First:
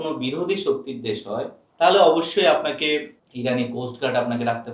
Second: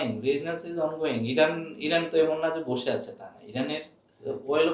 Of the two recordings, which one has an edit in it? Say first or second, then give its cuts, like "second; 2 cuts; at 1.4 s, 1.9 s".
first; 2 cuts; at 1.6 s, 3.2 s